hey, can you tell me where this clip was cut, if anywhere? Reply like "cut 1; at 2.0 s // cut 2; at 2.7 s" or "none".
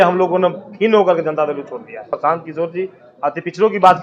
cut 1; at 2.1 s